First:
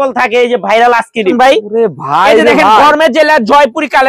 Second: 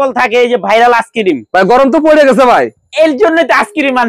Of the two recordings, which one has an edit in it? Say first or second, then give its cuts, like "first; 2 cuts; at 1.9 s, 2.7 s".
first; 1 cut; at 1.3 s